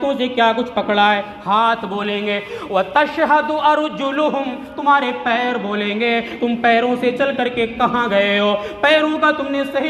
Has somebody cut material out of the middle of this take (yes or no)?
no